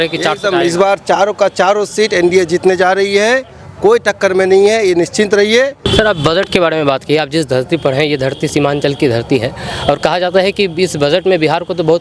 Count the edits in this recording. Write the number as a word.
one